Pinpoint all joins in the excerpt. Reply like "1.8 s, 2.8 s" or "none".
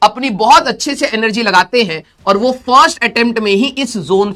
none